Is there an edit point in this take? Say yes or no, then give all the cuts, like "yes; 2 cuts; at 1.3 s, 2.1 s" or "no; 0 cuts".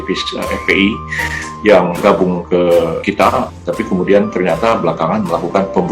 yes; 2 cuts; at 2.0 s, 3.2 s